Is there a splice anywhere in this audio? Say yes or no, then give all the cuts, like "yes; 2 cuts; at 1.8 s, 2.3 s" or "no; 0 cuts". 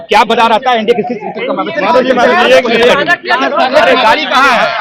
no; 0 cuts